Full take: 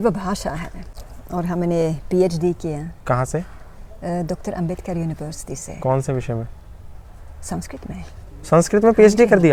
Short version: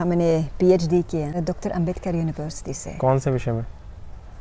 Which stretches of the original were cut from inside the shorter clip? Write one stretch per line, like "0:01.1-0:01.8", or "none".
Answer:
0:02.9-0:04.2

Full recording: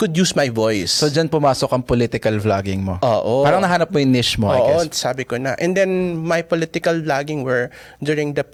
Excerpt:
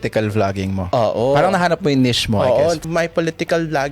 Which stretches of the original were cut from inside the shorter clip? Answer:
0:04.9-0:06.2

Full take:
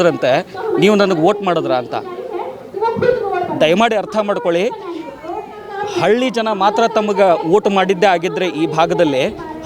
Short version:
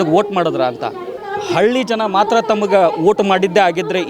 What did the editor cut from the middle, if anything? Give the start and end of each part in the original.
0:02.2-0:05.6

